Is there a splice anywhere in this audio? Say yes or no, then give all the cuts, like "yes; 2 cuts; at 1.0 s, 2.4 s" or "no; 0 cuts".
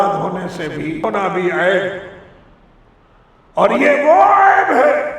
yes; 1 cut; at 1.0 s